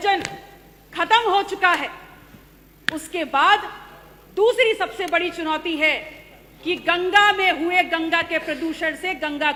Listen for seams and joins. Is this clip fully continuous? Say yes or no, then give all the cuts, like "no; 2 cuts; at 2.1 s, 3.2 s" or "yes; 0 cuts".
yes; 0 cuts